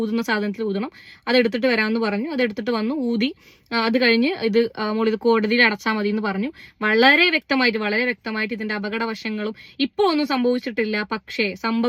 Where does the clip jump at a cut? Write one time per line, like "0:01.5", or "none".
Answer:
none